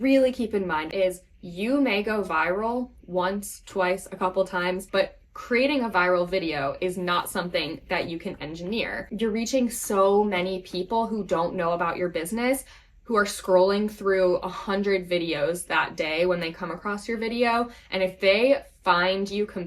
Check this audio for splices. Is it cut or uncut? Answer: cut